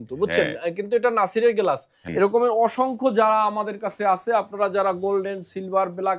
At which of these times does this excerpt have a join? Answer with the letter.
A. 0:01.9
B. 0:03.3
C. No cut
A